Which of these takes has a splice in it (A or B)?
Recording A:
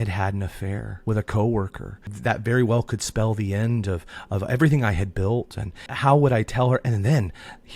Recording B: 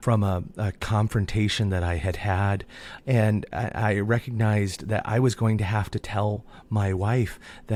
A